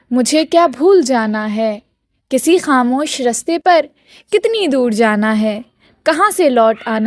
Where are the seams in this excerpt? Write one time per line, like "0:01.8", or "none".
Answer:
none